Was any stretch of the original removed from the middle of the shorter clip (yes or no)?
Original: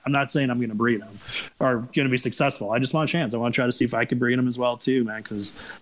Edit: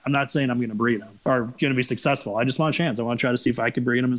yes